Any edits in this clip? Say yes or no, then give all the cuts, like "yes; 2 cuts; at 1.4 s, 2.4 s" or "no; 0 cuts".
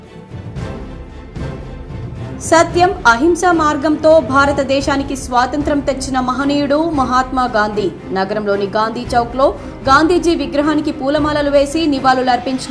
yes; 1 cut; at 2.3 s